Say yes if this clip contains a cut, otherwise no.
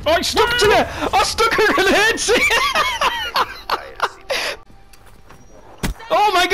yes